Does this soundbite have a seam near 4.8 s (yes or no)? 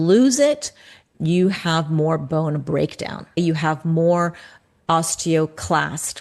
no